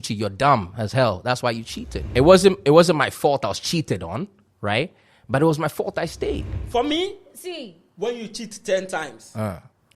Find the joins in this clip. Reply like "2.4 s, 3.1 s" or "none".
2.0 s, 6.6 s